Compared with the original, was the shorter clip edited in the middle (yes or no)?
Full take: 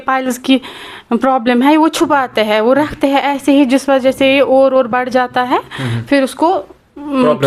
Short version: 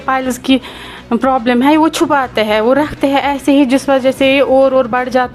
no